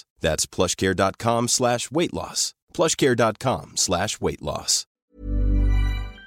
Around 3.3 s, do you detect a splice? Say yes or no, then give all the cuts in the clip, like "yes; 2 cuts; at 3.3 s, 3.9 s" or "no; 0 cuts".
no; 1 cut; at 5.1 s